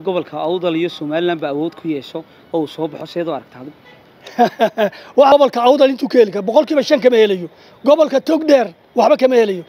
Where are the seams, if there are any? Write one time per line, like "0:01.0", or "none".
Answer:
0:05.3